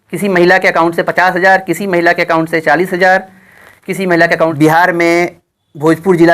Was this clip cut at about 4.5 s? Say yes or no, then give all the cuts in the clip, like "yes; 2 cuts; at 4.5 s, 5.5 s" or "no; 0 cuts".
yes; 1 cut; at 4.5 s